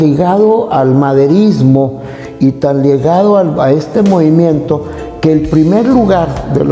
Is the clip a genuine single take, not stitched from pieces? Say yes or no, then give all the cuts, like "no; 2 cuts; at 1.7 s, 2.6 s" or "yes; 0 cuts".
yes; 0 cuts